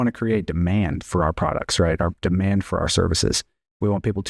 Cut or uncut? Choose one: uncut